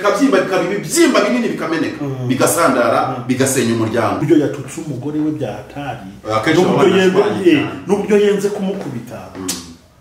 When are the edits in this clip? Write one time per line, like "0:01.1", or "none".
0:04.2